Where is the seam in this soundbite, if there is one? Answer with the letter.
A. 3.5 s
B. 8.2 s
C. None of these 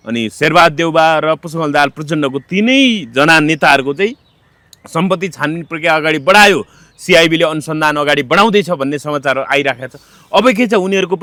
C